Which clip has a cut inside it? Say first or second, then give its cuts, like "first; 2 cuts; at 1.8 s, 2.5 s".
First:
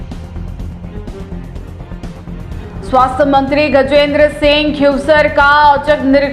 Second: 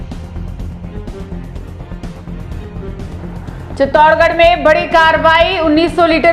second; 1 cut; at 2.6 s